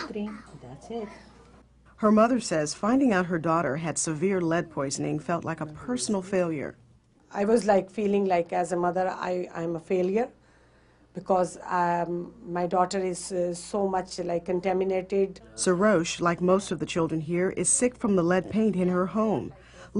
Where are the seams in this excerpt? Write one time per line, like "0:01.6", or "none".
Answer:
0:05.0